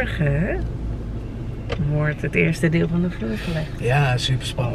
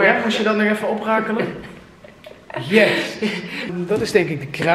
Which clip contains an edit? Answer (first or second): second